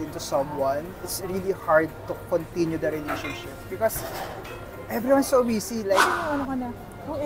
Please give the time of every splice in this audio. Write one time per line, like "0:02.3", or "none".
0:06.1